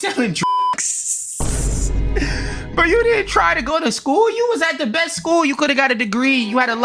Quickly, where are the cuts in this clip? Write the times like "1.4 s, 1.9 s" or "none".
none

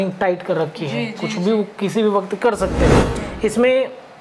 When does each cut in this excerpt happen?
3.1 s

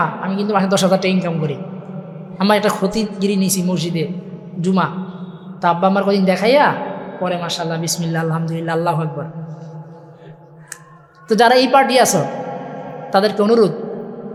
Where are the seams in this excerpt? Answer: none

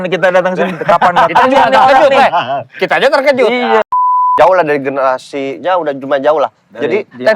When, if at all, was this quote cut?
4.3 s

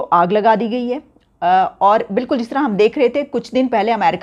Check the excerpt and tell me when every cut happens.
none

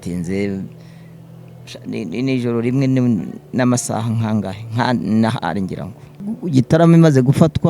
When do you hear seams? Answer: 6.3 s

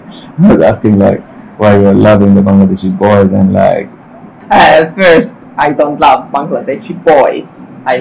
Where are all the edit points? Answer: 4.3 s

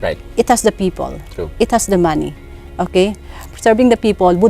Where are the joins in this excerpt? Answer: 3.4 s

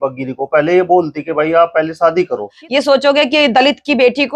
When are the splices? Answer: 2.6 s

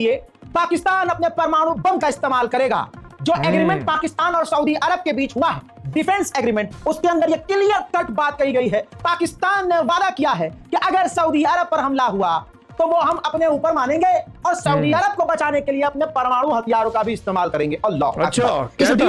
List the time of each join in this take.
none

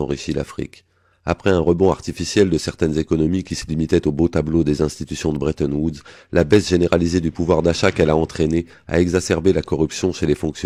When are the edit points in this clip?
none

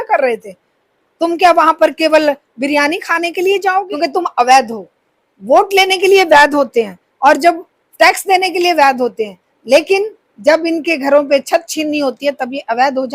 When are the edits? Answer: 3.9 s

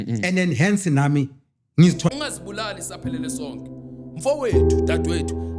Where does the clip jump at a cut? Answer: 2.1 s

